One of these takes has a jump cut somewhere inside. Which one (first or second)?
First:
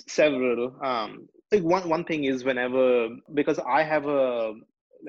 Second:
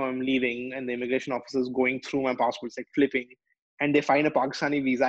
first